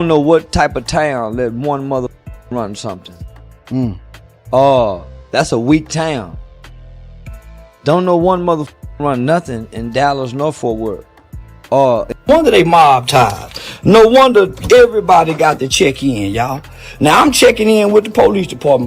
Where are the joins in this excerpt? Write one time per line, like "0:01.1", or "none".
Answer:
0:12.2